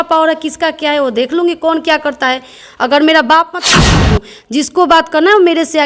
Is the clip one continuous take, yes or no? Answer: no